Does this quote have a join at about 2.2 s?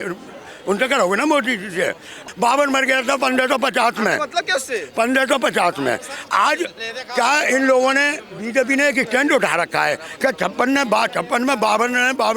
yes; 1 cut; at 2.2 s

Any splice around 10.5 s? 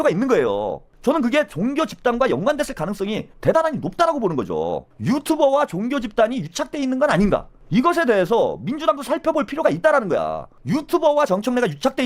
yes; 4 cuts; at 0.9 s, 4.9 s, 7.6 s, 10.5 s

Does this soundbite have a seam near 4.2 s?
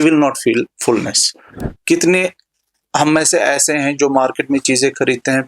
no; 1 cut; at 1.6 s

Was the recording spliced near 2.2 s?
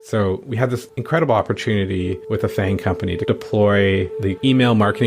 yes; 2 cuts; at 0.9 s, 2.2 s

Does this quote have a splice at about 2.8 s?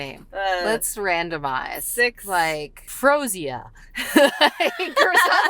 yes; 1 cut; at 2.8 s

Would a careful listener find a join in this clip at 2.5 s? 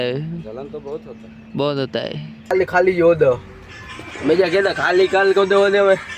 yes; 1 cut; at 2.5 s

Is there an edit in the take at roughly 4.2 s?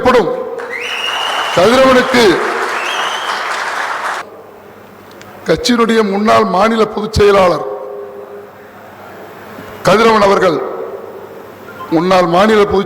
yes; 1 cut; at 4.2 s

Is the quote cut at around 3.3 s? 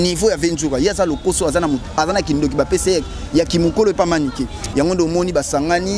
no; 1 cut; at 4.6 s

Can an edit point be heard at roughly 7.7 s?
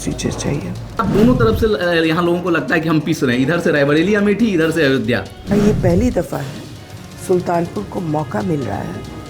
no; 2 cuts; at 1.1 s, 5.3 s

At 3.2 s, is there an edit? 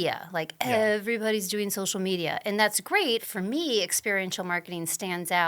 yes; 1 cut; at 3.2 s

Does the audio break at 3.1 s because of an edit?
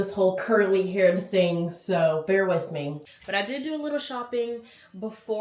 yes; 1 cut; at 3.1 s

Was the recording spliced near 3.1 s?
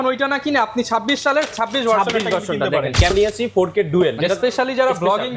yes; 1 cut; at 3.1 s

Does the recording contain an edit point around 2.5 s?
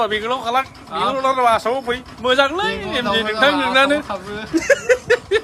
no; 0 cuts

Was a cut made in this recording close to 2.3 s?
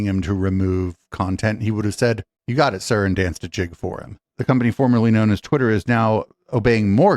no; 1 cut; at 4.2 s

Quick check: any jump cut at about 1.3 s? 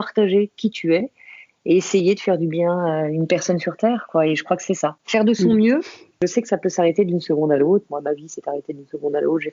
no; 1 cut; at 6.1 s

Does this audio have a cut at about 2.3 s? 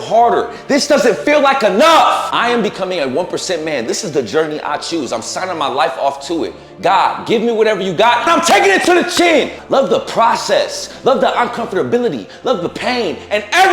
yes; 2 cuts; at 2.3 s, 9.6 s

